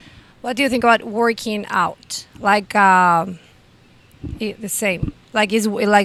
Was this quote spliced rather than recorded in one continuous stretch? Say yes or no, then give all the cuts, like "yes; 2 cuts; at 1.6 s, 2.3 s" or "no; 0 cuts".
no; 0 cuts